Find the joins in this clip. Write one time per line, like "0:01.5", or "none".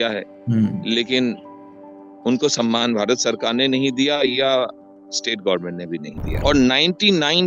0:06.2